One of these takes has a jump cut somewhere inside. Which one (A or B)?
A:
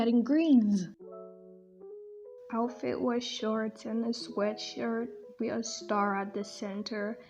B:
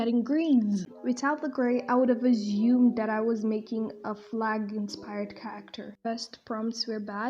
B